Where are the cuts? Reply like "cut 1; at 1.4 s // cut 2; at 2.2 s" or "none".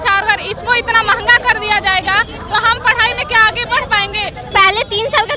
cut 1; at 4.4 s

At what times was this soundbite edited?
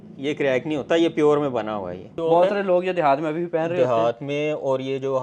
cut 1; at 2.2 s

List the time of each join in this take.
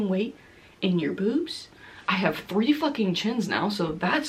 none

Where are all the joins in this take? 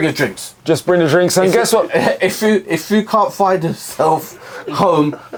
none

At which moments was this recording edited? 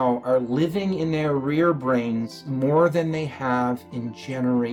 none

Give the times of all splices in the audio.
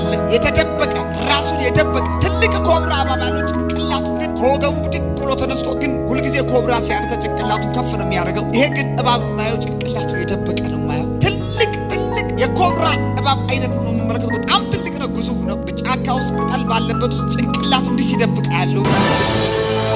cut 1; at 18.9 s

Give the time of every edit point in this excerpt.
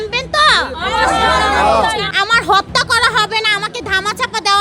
cut 1; at 2.1 s

